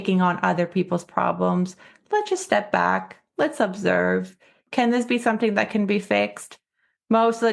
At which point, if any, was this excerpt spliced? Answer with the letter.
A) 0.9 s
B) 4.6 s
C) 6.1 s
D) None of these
B